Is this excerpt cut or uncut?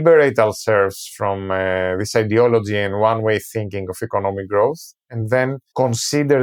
uncut